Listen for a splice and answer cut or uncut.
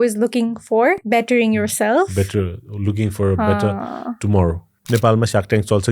cut